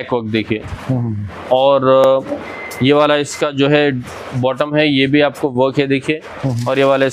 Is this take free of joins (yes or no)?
yes